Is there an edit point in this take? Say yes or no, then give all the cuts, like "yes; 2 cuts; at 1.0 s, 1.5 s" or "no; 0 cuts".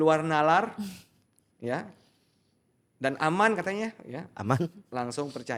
no; 0 cuts